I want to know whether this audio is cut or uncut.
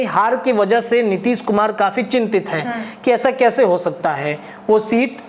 uncut